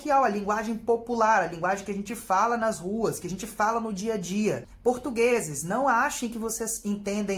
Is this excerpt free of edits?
no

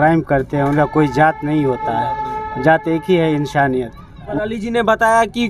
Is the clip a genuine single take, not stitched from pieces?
no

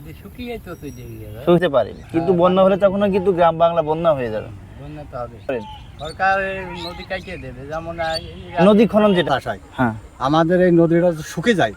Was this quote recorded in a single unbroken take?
no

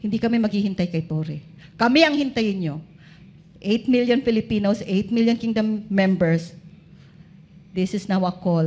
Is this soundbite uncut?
yes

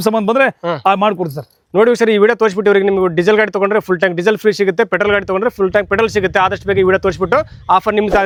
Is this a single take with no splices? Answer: yes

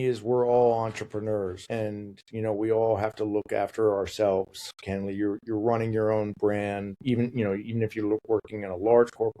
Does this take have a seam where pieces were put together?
yes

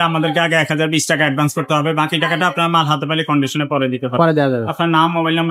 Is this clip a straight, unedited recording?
yes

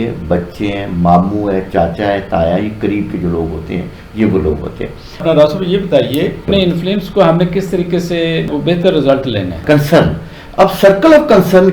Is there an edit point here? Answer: yes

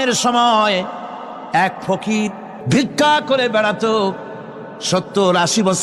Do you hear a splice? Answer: yes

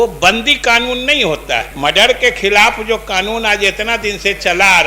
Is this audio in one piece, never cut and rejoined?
no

